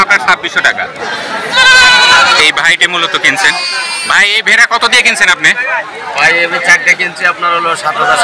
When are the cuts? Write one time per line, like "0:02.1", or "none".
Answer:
0:01.1